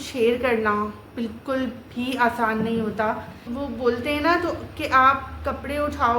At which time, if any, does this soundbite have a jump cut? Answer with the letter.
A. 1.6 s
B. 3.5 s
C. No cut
B